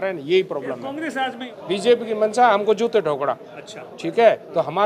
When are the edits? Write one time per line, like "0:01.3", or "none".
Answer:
0:01.5